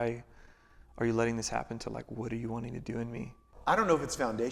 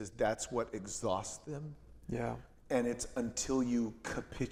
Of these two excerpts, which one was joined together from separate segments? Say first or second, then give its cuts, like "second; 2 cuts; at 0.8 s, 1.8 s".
first; 1 cut; at 3.4 s